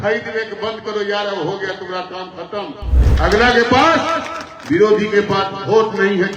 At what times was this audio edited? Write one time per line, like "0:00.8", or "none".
0:03.0